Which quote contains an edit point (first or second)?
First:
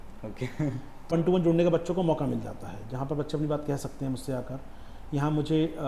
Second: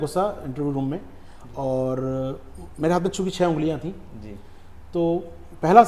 first